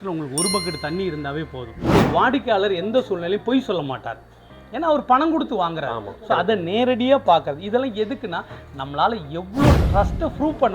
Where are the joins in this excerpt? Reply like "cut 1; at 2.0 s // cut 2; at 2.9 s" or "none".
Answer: cut 1; at 1.9 s